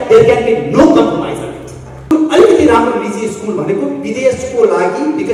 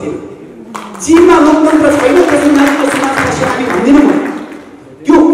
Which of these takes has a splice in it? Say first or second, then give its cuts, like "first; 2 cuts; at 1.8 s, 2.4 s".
first; 1 cut; at 2.0 s